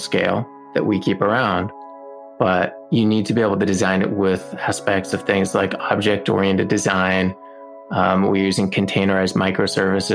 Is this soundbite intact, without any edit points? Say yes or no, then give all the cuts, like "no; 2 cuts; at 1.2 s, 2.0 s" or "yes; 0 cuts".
yes; 0 cuts